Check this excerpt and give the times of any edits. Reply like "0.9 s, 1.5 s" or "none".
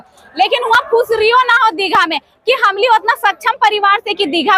none